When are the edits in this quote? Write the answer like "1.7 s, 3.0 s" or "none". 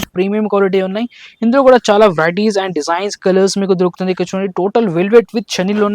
none

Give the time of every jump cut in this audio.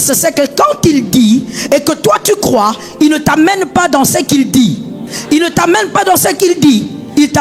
5.1 s

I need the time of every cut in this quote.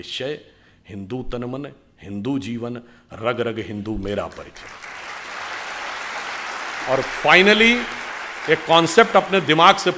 none

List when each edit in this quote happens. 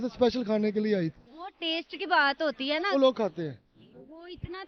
2.9 s

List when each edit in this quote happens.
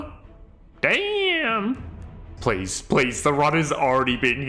2.3 s

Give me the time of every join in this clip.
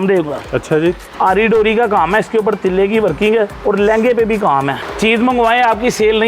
1.1 s, 3.5 s, 4.8 s

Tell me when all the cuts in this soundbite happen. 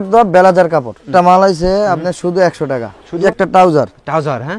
1.1 s, 3.2 s

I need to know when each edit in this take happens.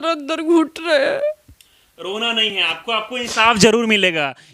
none

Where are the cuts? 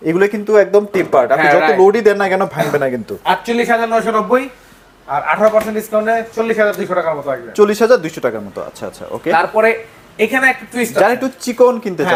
none

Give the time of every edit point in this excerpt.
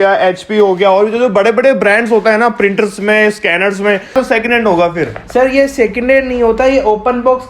4.1 s

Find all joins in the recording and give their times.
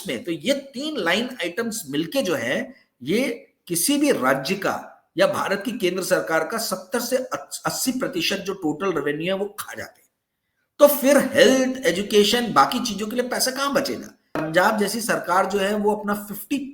14.4 s

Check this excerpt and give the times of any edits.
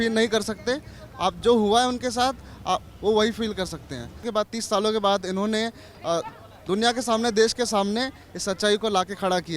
4.3 s

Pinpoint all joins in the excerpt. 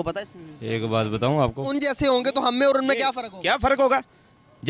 1.7 s

